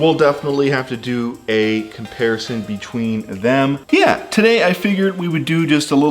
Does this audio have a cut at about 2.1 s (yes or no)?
no